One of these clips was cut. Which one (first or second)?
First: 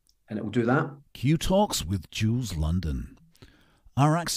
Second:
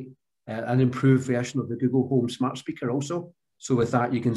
first